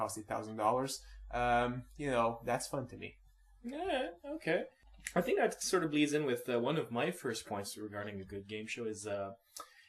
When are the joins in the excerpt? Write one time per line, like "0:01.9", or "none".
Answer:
0:05.6